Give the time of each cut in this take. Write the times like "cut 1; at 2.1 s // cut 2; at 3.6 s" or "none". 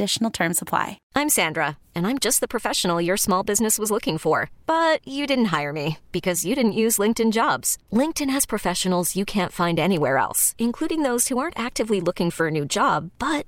cut 1; at 1.0 s